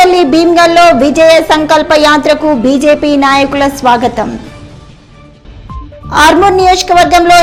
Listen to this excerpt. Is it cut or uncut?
uncut